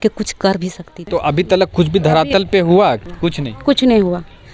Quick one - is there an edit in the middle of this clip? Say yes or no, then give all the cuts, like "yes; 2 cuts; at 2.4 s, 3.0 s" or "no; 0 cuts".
yes; 2 cuts; at 1.0 s, 3.0 s